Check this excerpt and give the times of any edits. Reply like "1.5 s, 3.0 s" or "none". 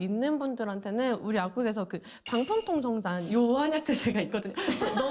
none